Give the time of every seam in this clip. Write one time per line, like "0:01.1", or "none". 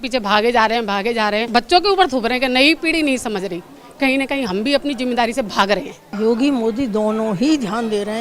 0:01.5
0:06.0